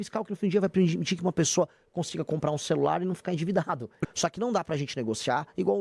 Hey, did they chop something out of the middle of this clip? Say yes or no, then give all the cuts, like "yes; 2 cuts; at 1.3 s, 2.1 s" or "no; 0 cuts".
yes; 1 cut; at 4.0 s